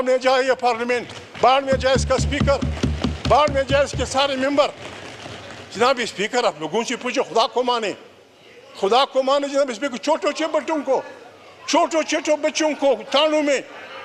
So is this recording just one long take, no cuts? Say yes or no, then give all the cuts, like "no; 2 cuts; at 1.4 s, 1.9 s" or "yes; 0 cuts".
yes; 0 cuts